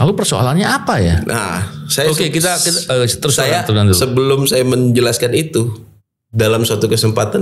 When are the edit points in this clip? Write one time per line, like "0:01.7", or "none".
none